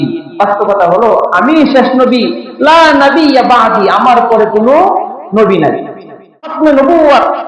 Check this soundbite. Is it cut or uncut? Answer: cut